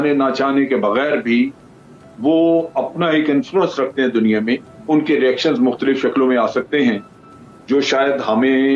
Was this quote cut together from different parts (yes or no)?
no